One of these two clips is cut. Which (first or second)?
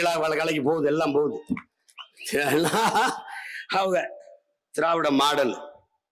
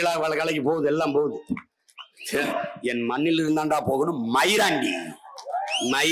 second